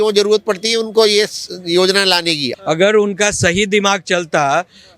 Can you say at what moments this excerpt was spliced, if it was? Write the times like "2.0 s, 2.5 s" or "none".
2.5 s

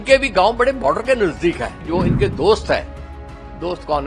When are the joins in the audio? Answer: 1.9 s

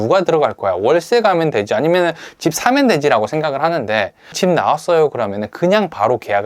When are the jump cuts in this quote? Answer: 4.3 s

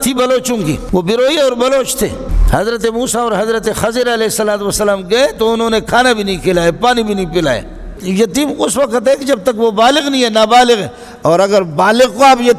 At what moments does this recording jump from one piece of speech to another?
0.8 s, 2.3 s, 8.0 s

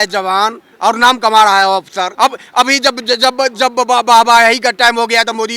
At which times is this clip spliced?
2.1 s

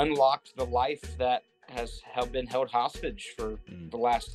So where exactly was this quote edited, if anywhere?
none

